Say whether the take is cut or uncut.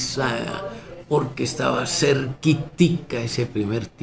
uncut